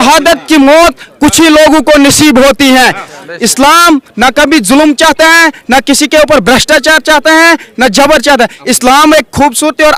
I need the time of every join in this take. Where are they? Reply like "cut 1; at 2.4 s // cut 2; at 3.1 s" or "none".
none